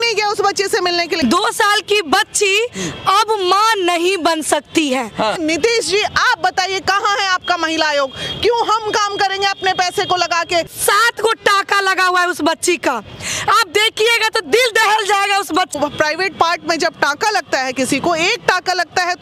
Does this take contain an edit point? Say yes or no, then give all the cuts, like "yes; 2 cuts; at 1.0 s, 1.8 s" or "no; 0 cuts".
yes; 4 cuts; at 1.1 s, 5.4 s, 10.7 s, 15.7 s